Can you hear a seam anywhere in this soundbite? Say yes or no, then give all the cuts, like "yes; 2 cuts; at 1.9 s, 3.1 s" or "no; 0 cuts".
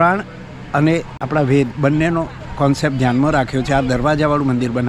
yes; 2 cuts; at 1.2 s, 2.4 s